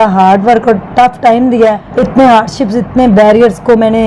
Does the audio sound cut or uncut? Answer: cut